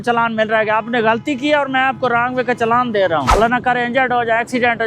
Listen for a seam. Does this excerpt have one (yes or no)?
yes